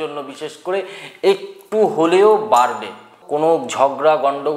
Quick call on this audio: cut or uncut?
cut